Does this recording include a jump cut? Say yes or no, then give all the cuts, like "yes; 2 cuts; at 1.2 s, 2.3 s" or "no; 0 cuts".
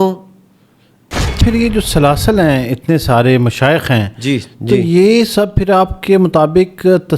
yes; 1 cut; at 1.4 s